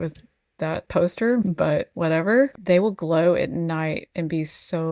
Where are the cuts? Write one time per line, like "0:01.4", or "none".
0:02.6